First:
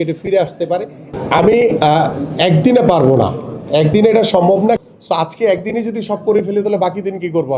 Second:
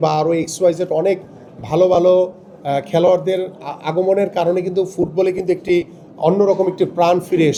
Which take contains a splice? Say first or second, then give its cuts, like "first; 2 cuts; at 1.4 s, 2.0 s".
first; 2 cuts; at 1.0 s, 4.8 s